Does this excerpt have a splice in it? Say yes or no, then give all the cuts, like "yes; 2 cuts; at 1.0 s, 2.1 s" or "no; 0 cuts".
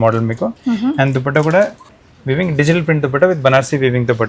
yes; 1 cut; at 1.8 s